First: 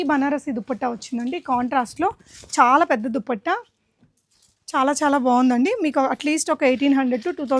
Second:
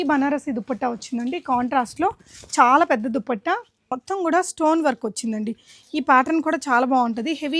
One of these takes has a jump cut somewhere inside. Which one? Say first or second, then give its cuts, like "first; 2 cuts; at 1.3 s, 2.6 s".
second; 1 cut; at 3.9 s